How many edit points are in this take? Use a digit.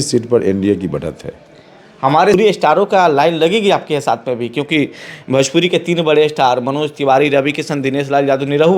1